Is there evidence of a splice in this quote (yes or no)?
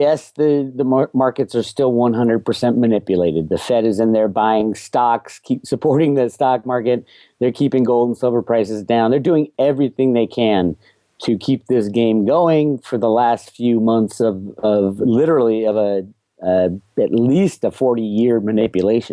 yes